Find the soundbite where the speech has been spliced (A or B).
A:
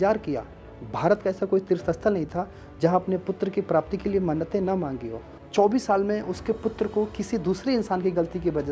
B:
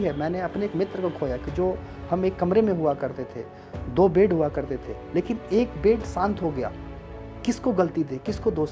A